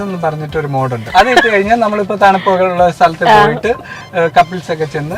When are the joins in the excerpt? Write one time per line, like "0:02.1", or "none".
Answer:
0:01.1